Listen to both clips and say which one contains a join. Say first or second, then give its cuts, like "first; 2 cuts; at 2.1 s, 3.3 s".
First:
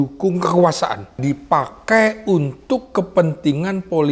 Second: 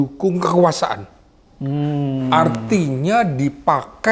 first; 1 cut; at 1.2 s